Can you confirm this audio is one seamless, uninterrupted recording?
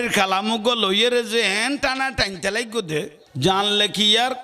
no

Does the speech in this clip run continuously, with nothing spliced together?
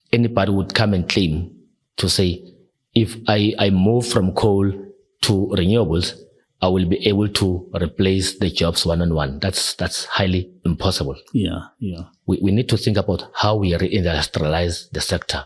yes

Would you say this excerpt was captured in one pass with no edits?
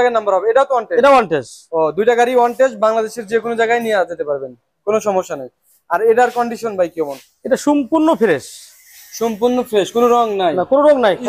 yes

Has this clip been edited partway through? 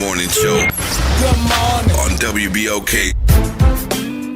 no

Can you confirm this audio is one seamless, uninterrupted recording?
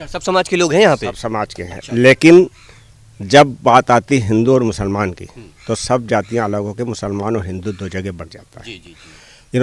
yes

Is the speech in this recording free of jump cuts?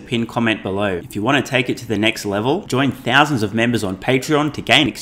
no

